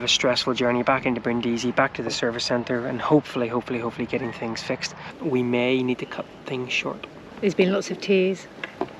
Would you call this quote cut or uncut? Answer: cut